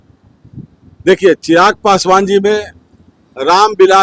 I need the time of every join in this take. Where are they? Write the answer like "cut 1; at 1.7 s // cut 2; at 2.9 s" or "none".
none

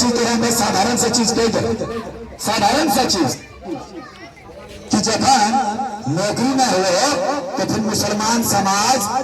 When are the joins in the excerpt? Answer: none

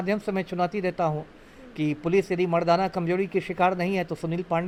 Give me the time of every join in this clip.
none

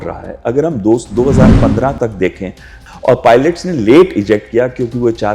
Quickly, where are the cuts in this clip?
cut 1; at 2.8 s

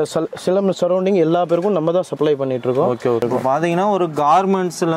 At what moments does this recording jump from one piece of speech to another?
cut 1; at 3.2 s

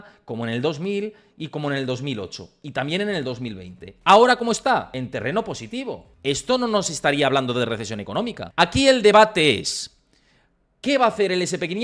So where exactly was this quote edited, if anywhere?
cut 1; at 4.9 s // cut 2; at 6.1 s // cut 3; at 8.4 s

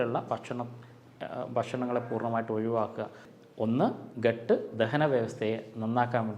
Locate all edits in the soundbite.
cut 1; at 3.2 s

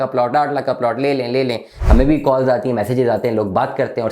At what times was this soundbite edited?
cut 1; at 1.7 s

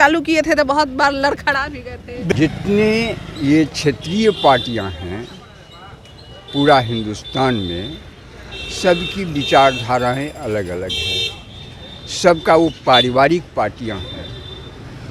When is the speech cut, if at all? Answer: cut 1; at 2.3 s

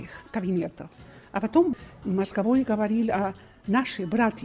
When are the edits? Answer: cut 1; at 1.7 s

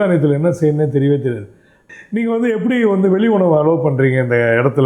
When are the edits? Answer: cut 1; at 1.8 s

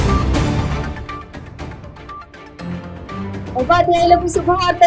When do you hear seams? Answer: cut 1; at 2.4 s

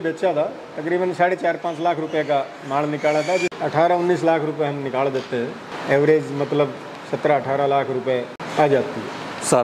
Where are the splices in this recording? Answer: cut 1; at 3.5 s // cut 2; at 5.7 s // cut 3; at 8.4 s

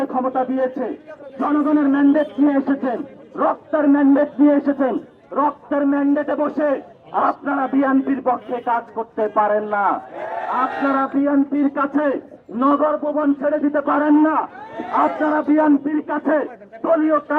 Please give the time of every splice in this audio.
none

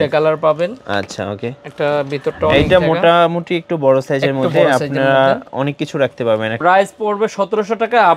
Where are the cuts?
cut 1; at 6.5 s

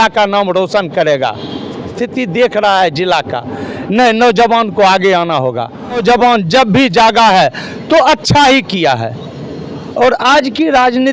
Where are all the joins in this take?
cut 1; at 1.9 s // cut 2; at 6.0 s

